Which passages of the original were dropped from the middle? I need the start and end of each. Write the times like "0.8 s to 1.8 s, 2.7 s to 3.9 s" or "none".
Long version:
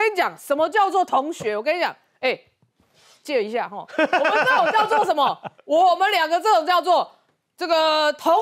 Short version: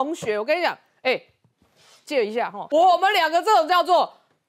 3.7 s to 5.6 s